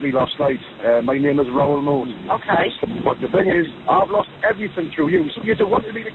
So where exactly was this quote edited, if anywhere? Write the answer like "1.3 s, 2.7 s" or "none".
2.1 s, 5.4 s